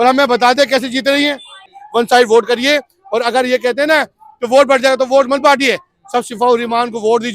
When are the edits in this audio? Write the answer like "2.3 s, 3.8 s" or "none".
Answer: 1.8 s